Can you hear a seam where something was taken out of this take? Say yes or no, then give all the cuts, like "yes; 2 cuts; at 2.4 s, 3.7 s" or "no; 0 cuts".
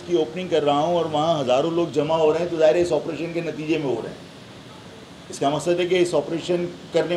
no; 0 cuts